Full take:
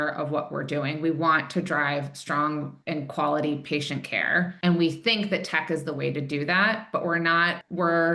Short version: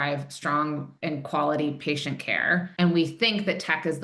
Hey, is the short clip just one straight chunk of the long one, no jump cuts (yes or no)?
yes